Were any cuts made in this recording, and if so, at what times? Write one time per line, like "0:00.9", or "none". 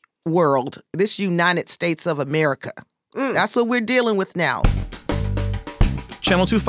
0:04.6